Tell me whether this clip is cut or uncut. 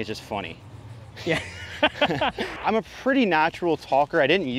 cut